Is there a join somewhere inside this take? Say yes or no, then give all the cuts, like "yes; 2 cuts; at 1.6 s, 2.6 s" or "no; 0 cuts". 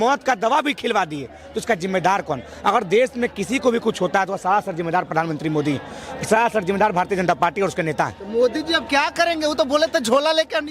no; 0 cuts